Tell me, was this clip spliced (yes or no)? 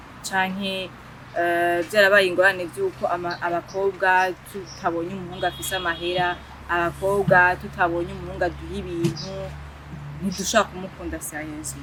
no